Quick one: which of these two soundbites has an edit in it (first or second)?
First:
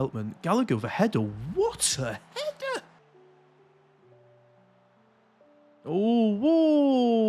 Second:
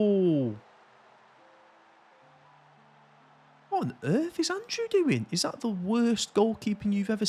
first